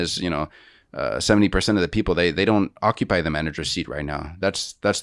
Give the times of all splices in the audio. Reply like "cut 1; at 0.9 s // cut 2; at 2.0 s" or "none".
none

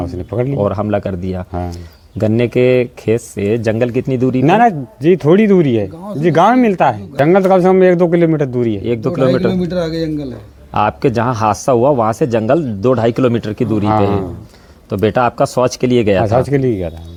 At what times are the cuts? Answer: none

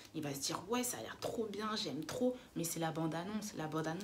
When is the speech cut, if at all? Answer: none

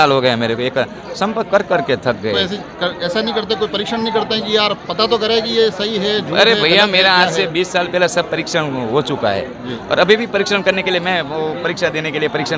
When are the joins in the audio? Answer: none

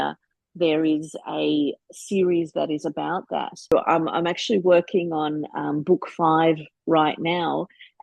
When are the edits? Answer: cut 1; at 3.7 s

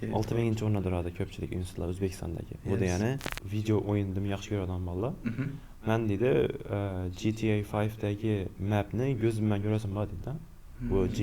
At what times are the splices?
cut 1; at 3.3 s

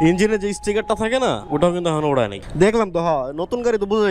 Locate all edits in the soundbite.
cut 1; at 1.4 s // cut 2; at 2.4 s

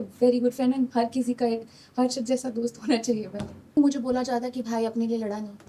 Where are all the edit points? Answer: cut 1; at 3.8 s

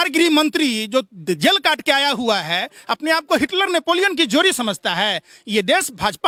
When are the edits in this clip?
none

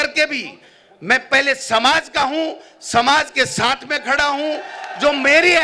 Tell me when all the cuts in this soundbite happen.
none

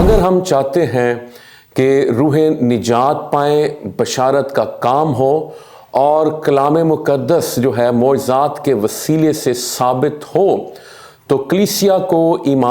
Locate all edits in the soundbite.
none

